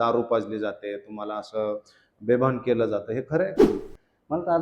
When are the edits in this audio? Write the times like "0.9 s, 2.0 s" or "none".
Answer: 3.7 s